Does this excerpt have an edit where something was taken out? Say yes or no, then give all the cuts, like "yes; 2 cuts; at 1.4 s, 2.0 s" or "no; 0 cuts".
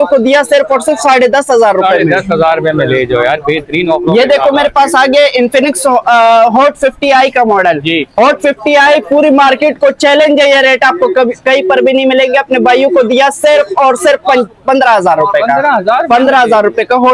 no; 0 cuts